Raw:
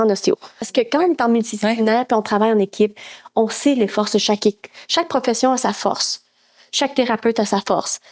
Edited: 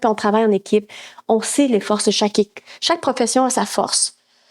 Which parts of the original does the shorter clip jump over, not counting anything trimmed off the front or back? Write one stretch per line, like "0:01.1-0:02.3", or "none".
none